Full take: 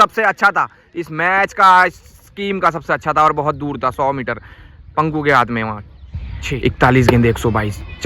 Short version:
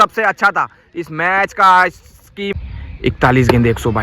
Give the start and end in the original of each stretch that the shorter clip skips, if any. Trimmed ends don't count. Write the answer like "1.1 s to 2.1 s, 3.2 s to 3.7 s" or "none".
2.5 s to 6.1 s